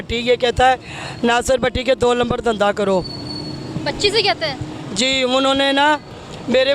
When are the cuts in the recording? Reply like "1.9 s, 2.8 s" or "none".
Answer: none